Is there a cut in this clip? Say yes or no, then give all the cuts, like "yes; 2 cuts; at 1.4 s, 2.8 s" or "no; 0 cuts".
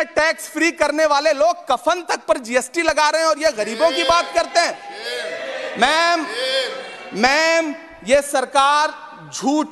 no; 0 cuts